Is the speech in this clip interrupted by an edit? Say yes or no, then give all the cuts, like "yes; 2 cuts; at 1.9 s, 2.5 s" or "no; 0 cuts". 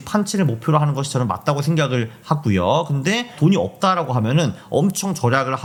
no; 0 cuts